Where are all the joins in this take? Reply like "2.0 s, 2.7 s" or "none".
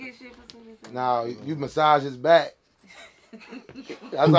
none